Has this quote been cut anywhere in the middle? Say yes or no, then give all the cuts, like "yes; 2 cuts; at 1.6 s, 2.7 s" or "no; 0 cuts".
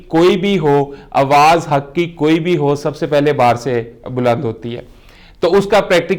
no; 0 cuts